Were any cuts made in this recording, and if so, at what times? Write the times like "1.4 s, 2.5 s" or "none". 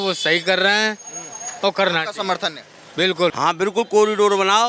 3.3 s